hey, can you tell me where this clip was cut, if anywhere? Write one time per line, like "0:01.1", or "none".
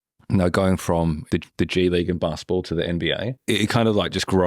0:01.3
0:03.4